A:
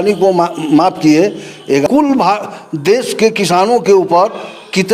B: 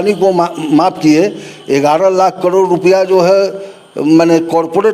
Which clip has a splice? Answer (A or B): A